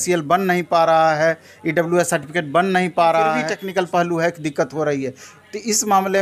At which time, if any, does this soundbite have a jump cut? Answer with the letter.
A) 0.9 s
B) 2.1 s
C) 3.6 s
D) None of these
C